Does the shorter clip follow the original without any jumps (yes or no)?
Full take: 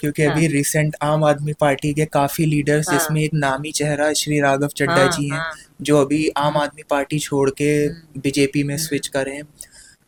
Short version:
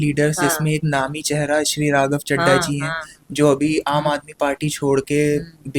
yes